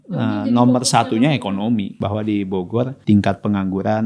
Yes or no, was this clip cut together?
yes